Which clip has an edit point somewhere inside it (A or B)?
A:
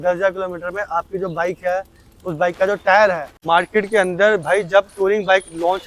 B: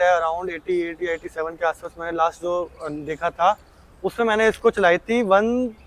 A